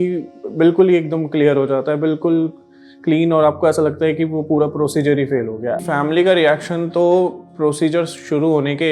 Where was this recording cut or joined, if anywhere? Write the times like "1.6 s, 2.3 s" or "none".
5.8 s